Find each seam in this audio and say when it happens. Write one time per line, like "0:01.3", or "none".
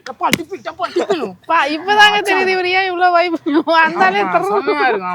none

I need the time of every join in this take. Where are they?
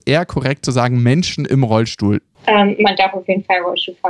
0:02.3

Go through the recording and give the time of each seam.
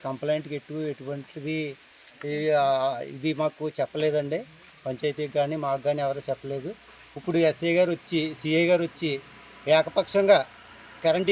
none

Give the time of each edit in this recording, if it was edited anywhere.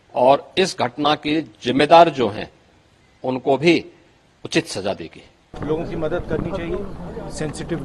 0:05.5

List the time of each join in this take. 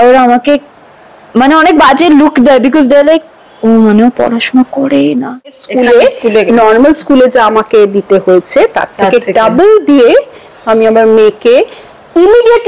0:05.6

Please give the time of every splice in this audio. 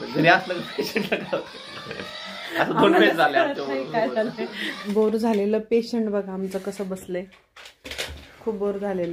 0:04.7

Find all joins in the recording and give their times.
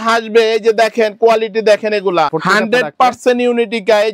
0:02.3

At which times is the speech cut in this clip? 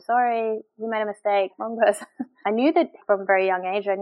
0:02.2
0:03.0

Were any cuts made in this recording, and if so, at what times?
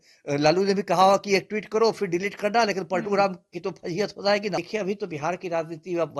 0:04.6

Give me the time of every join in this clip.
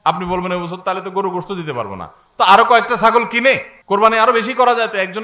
0:03.7

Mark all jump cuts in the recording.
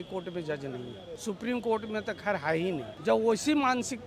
0:01.1
0:02.9

